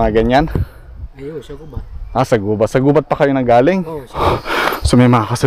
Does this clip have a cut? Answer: yes; 1 cut; at 4.2 s

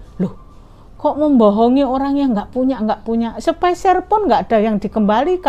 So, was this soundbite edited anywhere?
no; 0 cuts

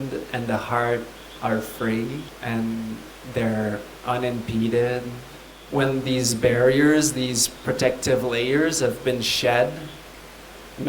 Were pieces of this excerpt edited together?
yes; 2 cuts; at 2.3 s, 5.5 s

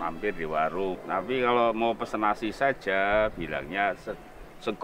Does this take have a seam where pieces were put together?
yes; 1 cut; at 1.0 s

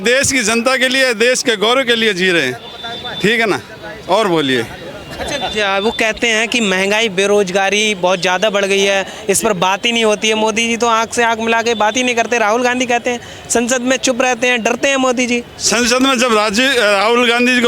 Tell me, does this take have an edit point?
no; 0 cuts

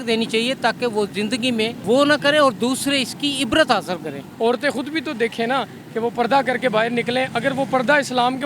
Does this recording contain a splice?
yes; 2 cuts; at 1.8 s, 4.3 s

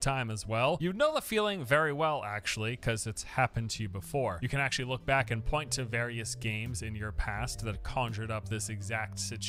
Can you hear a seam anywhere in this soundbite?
no; 0 cuts

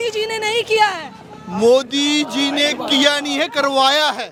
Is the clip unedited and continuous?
yes; 0 cuts

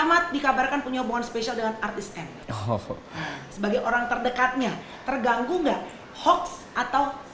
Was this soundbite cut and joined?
yes; 1 cut; at 2.4 s

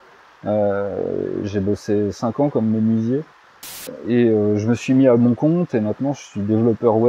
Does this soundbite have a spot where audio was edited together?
yes; 1 cut; at 3.9 s

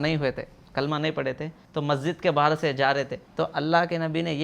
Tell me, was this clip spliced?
yes; 2 cuts; at 1.6 s, 3.2 s

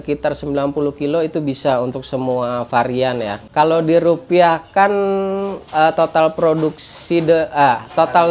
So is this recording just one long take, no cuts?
no; 1 cut; at 3.5 s

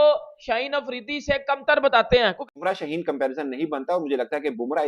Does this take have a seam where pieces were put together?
yes; 1 cut; at 2.4 s

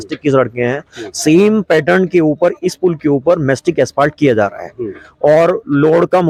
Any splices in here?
no; 0 cuts

